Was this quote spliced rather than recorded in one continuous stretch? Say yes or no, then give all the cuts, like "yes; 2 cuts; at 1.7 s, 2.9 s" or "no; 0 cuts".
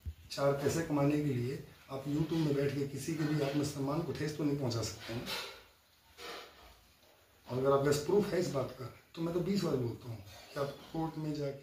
no; 0 cuts